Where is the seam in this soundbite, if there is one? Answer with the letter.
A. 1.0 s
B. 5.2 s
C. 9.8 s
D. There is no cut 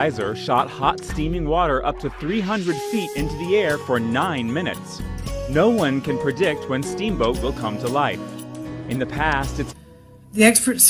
D